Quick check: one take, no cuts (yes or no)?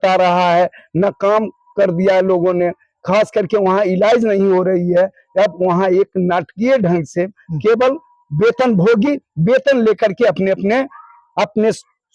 yes